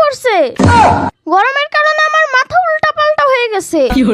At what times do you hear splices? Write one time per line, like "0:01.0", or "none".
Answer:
none